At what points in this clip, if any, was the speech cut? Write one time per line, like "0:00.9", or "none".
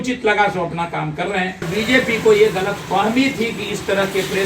0:01.7